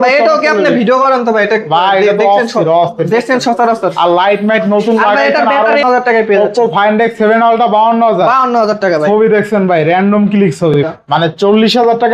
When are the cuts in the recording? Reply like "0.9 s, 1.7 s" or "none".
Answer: 5.7 s, 10.8 s